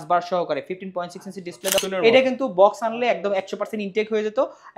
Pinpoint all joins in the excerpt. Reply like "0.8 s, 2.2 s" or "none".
1.8 s